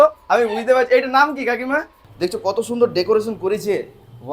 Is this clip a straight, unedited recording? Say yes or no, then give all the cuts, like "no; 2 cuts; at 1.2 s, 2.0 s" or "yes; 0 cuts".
no; 1 cut; at 2.0 s